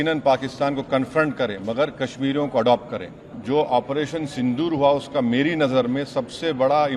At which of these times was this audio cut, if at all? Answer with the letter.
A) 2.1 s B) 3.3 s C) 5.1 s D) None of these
B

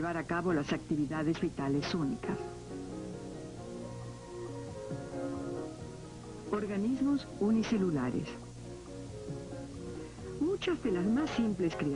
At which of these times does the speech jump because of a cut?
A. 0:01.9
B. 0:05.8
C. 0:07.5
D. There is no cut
D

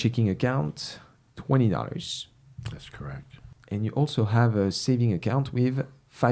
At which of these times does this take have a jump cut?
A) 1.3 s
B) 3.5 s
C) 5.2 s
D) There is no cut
B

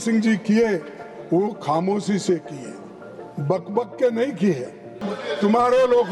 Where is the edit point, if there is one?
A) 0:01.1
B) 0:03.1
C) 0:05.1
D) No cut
C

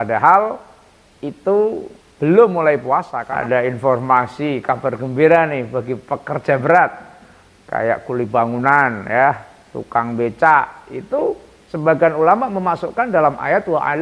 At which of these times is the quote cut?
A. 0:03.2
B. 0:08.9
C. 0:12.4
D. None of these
A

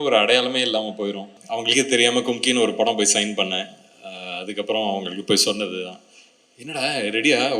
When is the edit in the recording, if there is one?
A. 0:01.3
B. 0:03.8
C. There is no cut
A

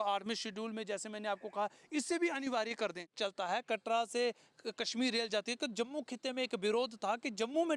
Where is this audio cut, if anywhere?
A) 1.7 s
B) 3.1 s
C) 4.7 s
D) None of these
B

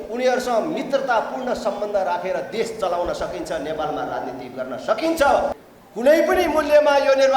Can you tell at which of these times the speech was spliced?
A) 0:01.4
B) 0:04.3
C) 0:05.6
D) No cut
C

